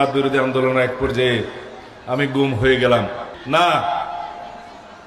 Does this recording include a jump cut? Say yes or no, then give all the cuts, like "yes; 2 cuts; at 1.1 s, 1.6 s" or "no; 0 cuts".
yes; 1 cut; at 3.3 s